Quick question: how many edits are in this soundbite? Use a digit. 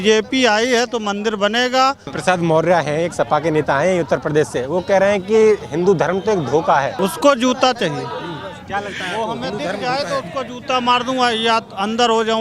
2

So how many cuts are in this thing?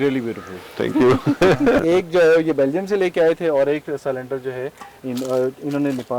2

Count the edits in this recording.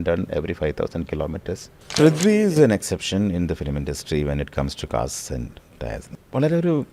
2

